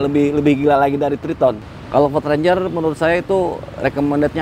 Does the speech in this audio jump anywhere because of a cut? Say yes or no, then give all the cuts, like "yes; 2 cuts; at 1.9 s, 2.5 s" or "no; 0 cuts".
yes; 1 cut; at 1.7 s